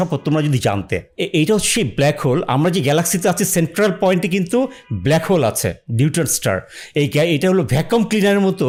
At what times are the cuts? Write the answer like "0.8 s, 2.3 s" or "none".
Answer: none